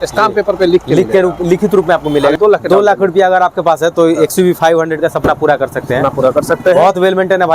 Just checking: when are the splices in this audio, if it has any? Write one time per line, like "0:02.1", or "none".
0:02.4

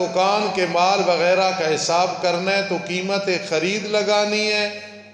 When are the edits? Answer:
none

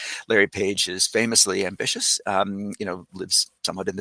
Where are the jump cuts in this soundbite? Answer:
none

